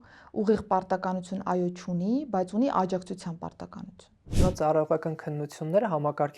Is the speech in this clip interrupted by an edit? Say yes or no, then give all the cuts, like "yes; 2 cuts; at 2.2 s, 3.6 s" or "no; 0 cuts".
yes; 1 cut; at 4.3 s